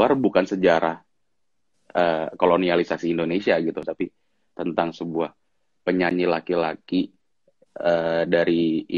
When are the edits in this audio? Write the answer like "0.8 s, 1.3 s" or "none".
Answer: 3.9 s